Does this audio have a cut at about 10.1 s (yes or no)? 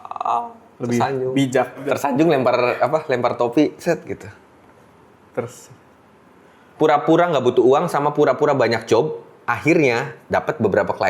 yes